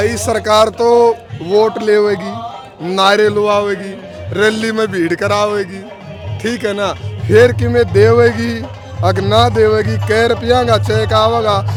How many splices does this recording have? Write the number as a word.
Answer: zero